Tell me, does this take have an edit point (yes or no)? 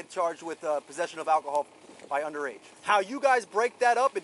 yes